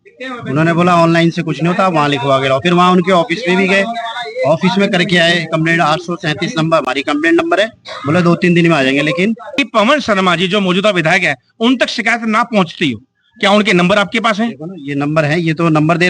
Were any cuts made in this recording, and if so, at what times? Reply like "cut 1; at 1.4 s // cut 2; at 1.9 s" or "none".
cut 1; at 9.5 s